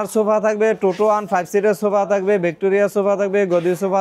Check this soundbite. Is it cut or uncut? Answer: uncut